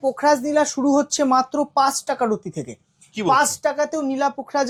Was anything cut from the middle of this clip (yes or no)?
no